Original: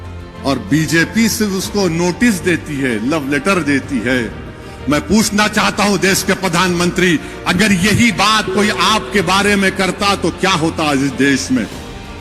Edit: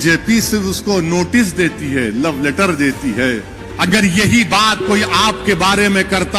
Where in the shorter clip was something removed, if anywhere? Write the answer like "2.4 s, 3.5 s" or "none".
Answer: 3.7 s

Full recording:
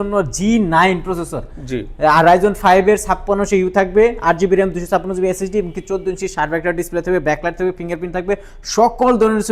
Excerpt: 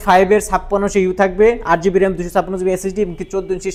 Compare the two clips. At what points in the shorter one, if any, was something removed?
none

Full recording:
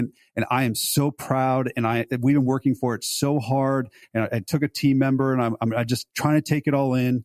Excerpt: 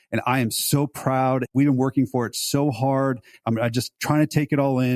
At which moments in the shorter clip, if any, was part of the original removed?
1.5 s, 3.4 s

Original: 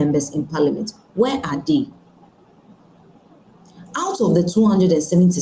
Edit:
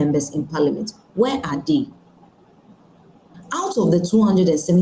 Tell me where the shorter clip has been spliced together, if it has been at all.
3.3 s

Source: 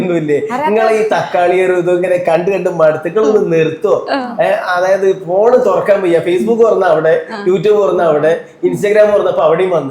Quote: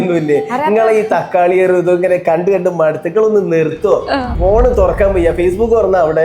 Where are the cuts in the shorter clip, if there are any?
4.3 s

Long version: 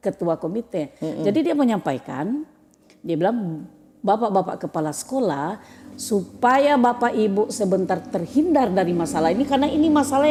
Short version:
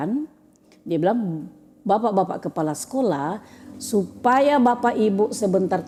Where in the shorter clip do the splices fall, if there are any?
none

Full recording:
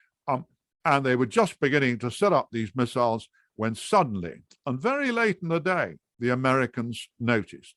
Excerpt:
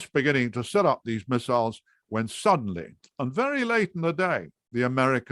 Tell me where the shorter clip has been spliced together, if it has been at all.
none

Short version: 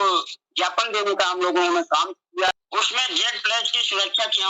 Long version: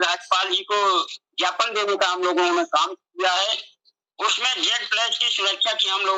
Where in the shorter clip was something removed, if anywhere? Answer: 2.5 s

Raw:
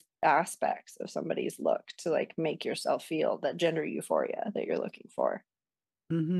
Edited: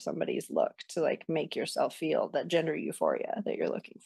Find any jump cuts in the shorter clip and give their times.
none

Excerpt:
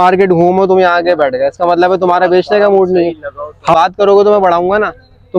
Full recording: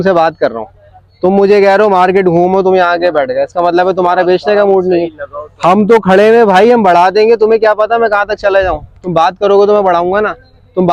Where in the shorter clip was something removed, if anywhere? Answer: 3.7 s

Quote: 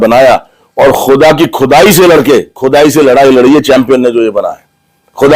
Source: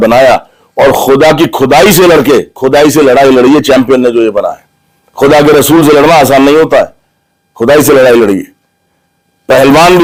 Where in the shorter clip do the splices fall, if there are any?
none

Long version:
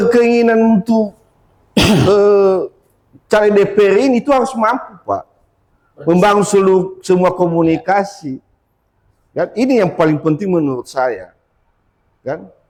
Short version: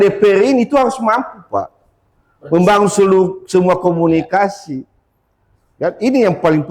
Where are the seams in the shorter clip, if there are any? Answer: none

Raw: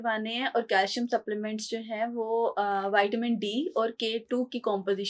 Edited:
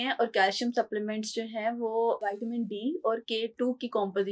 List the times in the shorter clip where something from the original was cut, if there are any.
2.2 s

